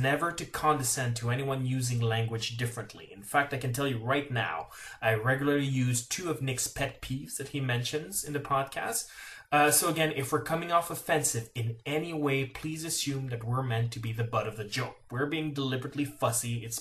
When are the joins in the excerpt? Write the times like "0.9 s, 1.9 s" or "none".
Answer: 8.4 s